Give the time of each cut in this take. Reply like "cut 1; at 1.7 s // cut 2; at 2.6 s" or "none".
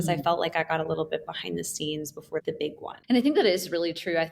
cut 1; at 3.0 s

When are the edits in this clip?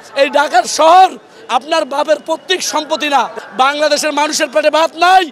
cut 1; at 3.3 s

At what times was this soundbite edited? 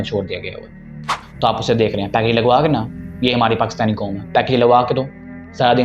cut 1; at 1.2 s

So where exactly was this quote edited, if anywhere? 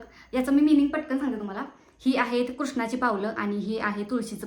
none

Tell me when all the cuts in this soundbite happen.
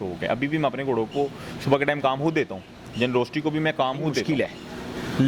cut 1; at 4.2 s

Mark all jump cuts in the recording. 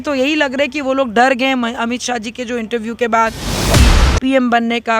cut 1; at 3.7 s

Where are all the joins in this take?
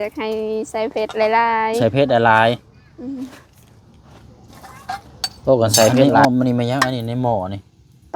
cut 1; at 6.1 s

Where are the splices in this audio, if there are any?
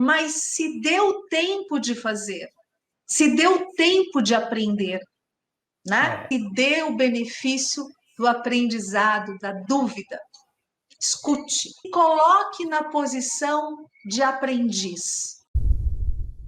cut 1; at 15.5 s

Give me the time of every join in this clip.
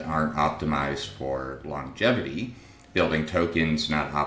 none

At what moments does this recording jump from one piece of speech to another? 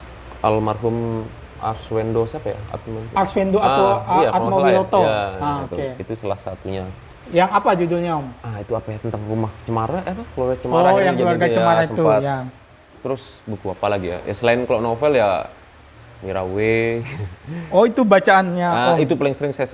none

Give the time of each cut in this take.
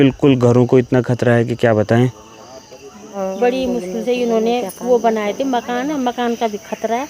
cut 1; at 3.2 s

